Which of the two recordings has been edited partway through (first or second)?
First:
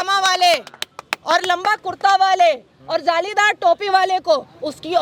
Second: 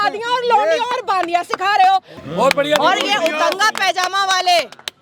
second